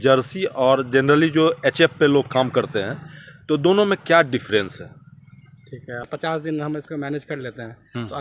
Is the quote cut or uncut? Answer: cut